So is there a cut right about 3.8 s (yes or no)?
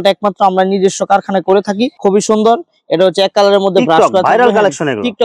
no